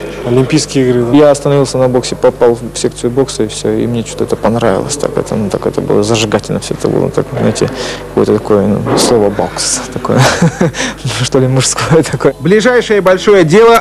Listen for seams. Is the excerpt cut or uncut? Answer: cut